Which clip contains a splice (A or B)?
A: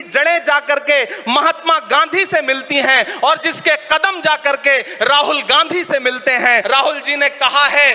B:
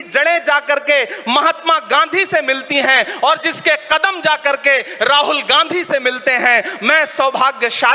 A